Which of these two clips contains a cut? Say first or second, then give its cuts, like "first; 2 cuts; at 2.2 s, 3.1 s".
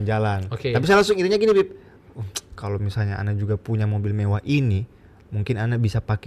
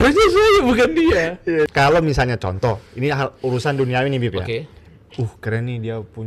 second; 1 cut; at 1.7 s